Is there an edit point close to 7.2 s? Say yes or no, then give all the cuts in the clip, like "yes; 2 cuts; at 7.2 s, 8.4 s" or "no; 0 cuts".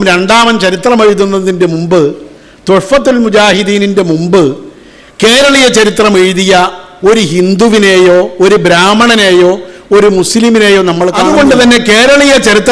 no; 1 cut; at 11.2 s